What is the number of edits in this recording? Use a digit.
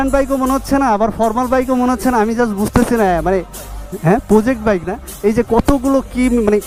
0